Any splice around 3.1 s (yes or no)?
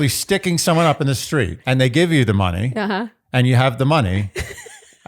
no